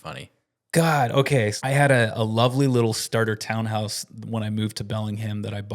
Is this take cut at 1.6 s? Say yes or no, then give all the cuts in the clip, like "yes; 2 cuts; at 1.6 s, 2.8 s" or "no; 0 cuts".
yes; 1 cut; at 1.6 s